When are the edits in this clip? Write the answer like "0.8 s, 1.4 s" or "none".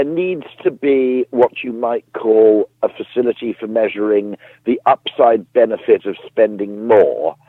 none